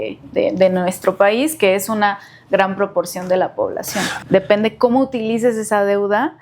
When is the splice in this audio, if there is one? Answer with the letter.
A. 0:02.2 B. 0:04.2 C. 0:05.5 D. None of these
B